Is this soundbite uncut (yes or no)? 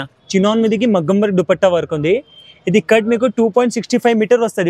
yes